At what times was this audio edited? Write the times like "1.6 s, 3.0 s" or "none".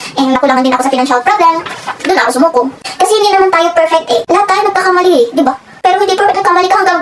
2.8 s